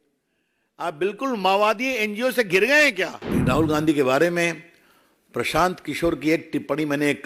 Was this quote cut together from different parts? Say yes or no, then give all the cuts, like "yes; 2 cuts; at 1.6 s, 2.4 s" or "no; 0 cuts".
yes; 1 cut; at 3.2 s